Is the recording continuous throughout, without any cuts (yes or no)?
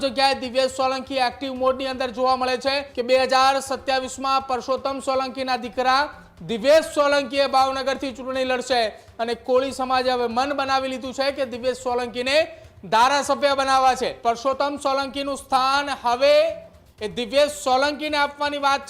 no